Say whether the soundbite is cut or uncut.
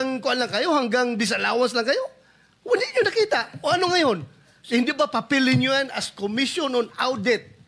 uncut